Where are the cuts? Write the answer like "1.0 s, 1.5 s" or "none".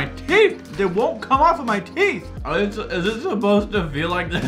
none